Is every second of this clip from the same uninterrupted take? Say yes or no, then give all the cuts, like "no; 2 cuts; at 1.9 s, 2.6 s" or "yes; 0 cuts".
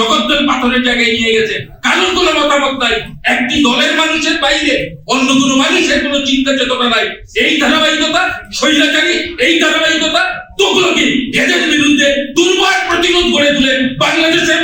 yes; 0 cuts